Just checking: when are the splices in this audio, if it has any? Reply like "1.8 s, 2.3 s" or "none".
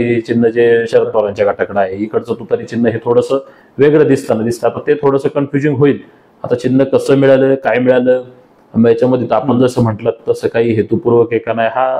none